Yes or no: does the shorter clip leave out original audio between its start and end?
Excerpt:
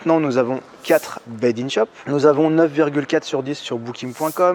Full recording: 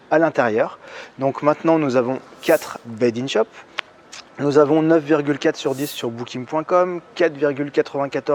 yes